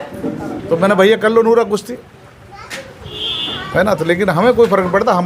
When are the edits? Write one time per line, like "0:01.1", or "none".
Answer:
none